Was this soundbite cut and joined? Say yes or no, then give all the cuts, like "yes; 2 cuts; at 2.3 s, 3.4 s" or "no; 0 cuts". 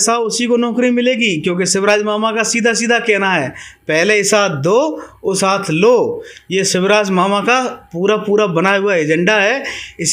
no; 0 cuts